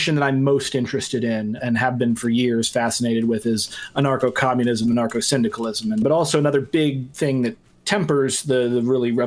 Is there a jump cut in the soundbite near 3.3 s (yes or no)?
no